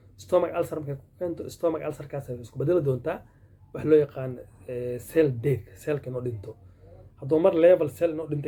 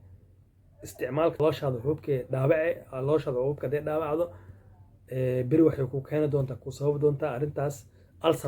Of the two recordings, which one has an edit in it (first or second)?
second